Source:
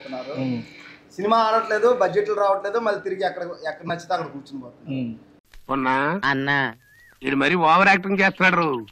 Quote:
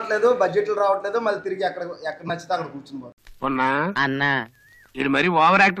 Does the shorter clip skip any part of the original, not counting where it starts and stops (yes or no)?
yes